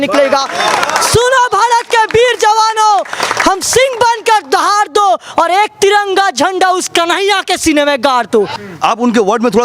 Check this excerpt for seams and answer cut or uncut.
cut